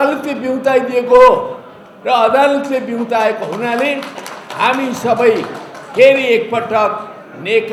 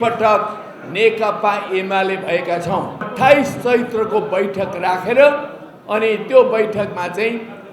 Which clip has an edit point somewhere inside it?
second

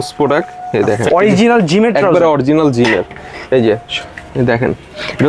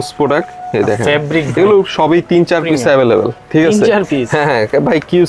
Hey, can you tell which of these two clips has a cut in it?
first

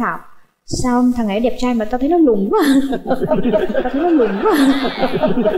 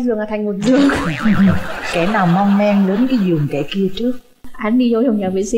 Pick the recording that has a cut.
second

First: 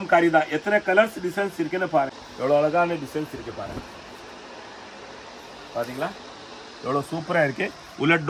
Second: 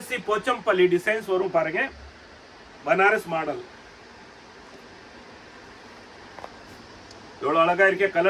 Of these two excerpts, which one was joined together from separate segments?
first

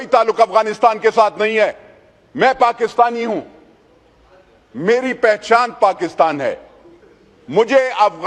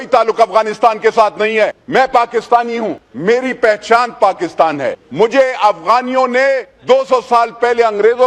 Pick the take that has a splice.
second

